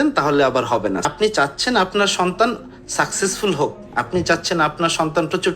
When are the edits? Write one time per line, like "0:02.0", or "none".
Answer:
0:01.1